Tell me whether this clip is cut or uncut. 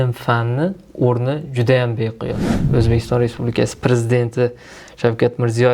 cut